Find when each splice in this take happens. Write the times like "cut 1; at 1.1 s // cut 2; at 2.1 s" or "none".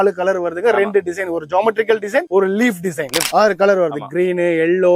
cut 1; at 3.2 s